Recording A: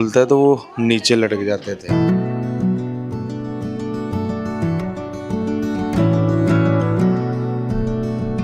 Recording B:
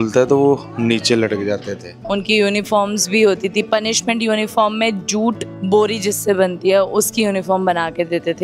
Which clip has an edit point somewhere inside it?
B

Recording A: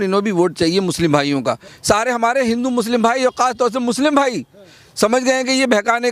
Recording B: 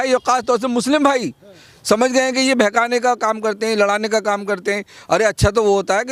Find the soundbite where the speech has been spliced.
A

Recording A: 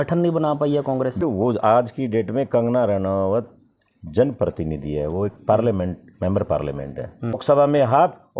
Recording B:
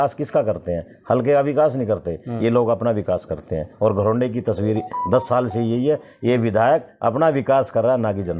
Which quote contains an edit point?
A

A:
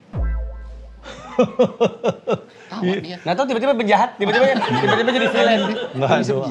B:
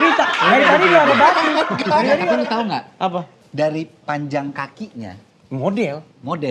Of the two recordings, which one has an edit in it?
B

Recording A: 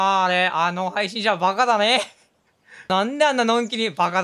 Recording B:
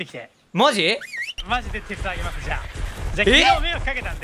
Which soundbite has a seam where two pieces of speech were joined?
B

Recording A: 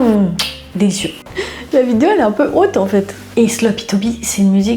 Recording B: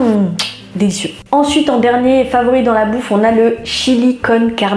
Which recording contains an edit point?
A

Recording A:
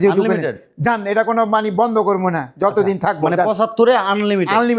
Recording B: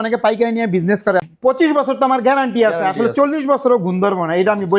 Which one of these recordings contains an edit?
B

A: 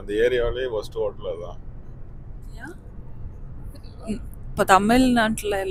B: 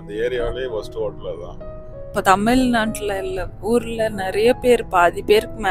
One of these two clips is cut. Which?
B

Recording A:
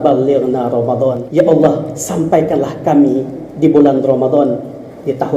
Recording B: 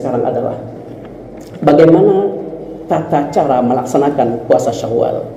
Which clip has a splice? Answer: A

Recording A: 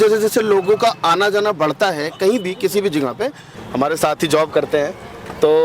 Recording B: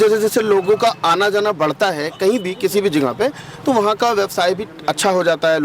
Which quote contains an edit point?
A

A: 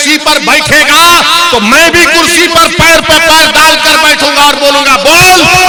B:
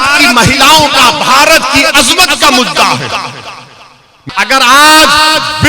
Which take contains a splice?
B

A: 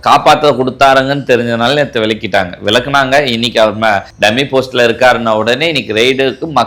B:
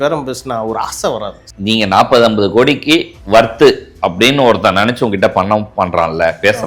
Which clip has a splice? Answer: B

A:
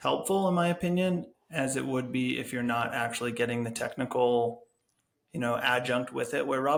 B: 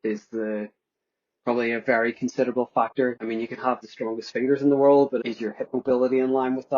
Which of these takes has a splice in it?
B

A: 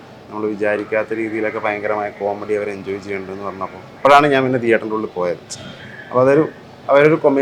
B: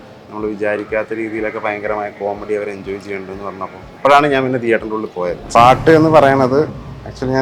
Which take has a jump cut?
B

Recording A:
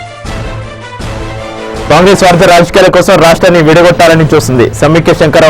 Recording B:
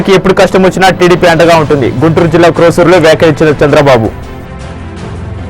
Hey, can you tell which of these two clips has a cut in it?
A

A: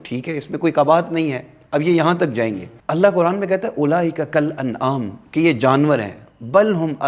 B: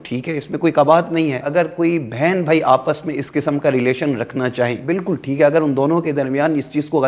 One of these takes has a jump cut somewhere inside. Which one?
B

